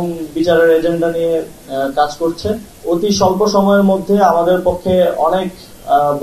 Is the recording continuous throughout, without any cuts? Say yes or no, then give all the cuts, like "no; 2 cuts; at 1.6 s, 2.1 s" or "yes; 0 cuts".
no; 1 cut; at 2.7 s